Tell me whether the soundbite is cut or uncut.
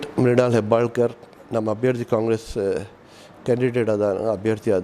uncut